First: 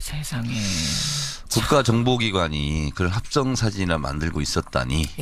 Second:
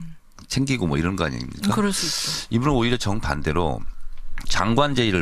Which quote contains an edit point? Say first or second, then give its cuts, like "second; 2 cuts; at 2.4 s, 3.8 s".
first; 1 cut; at 3.4 s